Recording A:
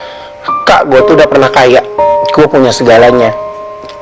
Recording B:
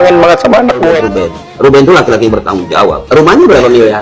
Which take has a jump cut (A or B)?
B